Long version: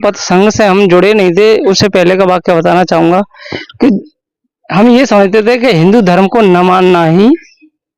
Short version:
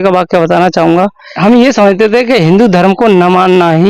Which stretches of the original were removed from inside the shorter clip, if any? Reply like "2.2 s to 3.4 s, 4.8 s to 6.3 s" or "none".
3.4 s to 4.6 s